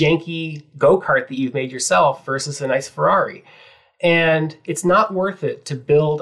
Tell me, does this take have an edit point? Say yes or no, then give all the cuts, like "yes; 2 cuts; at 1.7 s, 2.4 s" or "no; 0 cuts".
no; 0 cuts